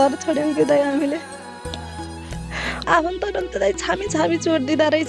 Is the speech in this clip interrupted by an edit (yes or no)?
yes